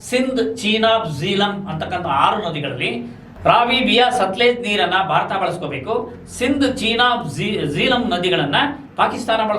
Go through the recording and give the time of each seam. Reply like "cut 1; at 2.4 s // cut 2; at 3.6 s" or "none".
cut 1; at 3.2 s